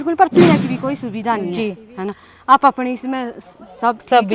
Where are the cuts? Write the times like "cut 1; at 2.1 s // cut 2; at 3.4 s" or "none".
none